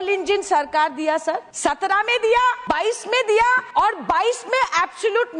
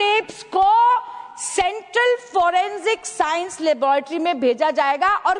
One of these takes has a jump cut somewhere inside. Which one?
first; 3 cuts; at 1.5 s, 2.6 s, 3.6 s

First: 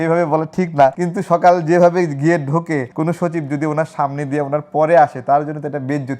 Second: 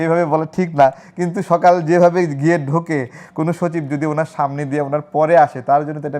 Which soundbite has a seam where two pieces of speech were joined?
first; 2 cuts; at 1.0 s, 2.9 s

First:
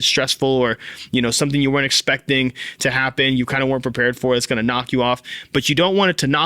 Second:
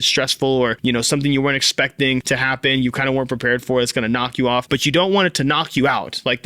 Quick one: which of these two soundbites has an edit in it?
second; 3 cuts; at 0.8 s, 2.2 s, 4.7 s

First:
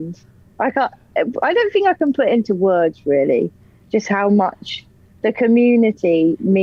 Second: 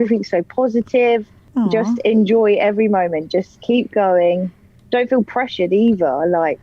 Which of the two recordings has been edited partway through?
second; 1 cut; at 1.4 s

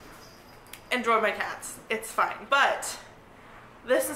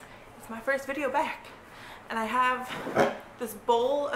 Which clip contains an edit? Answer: first; 1 cut; at 2.4 s

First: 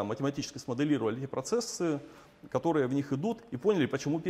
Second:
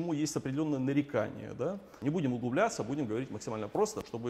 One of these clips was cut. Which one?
second; 1 cut; at 1.9 s

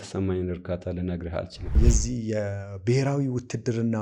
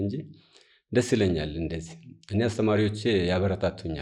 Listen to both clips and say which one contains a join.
first; 1 cut; at 1.8 s

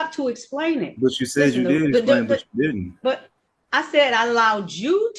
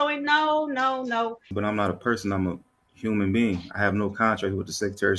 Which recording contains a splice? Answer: second; 1 cut; at 1.5 s

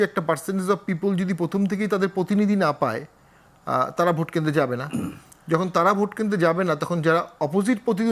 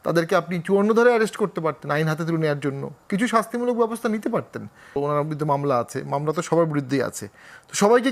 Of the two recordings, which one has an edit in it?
second; 1 cut; at 5.0 s

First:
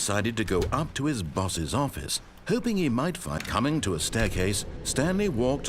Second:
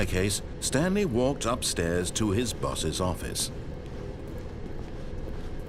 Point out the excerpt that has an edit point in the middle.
first; 1 cut; at 3.3 s

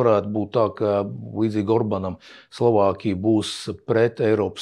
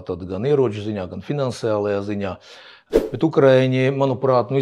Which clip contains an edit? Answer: second; 1 cut; at 2.9 s

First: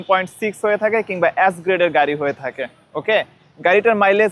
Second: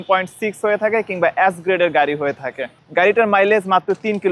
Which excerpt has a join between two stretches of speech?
second; 1 cut; at 2.7 s

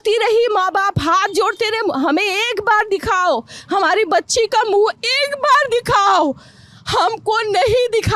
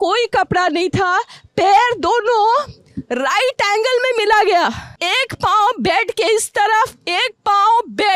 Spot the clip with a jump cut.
second; 1 cut; at 4.9 s

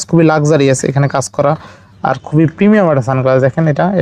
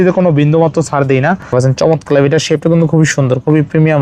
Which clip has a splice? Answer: second; 1 cut; at 1.5 s

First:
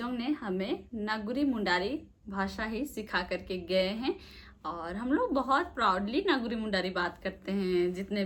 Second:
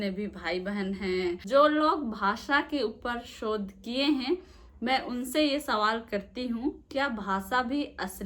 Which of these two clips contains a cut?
second; 1 cut; at 1.4 s

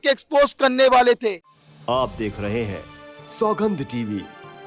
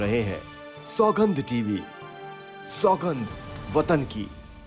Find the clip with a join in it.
first; 1 cut; at 1.5 s

